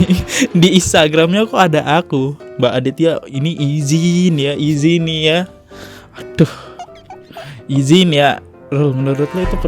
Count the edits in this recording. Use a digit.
0